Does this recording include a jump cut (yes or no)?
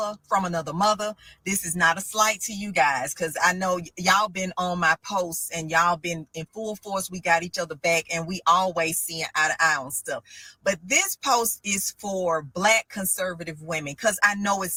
no